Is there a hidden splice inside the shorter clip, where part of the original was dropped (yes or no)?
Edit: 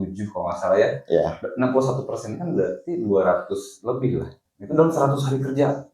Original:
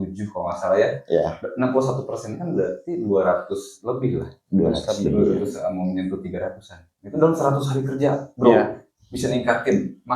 yes